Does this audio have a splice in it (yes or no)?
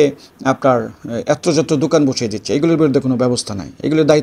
no